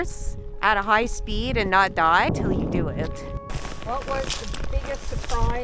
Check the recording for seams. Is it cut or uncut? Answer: cut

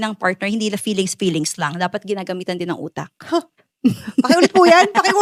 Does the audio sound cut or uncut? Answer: uncut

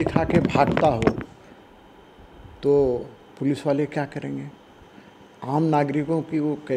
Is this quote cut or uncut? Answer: uncut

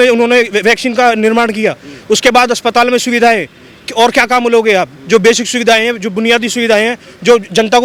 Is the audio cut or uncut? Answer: uncut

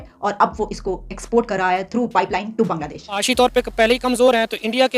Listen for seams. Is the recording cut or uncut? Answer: cut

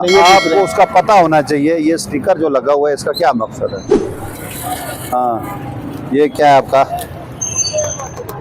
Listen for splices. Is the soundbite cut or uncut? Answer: uncut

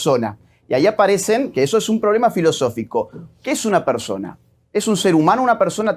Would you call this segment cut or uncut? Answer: uncut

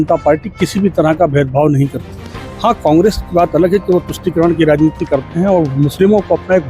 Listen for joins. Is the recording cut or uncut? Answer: uncut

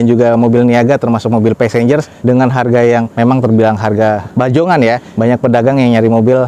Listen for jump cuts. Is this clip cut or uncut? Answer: uncut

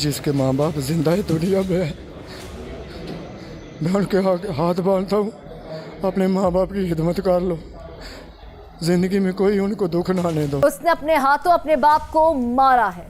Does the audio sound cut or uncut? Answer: cut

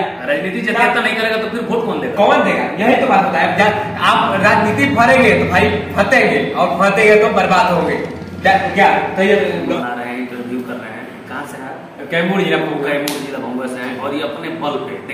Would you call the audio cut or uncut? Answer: cut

